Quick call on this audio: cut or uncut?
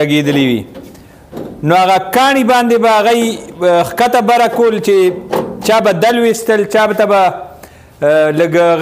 uncut